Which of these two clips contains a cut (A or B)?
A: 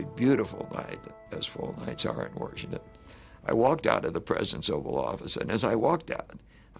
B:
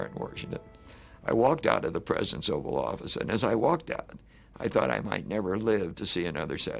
A